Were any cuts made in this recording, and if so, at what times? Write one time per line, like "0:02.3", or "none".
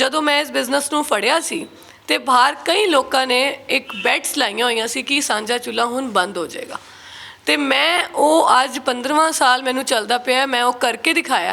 none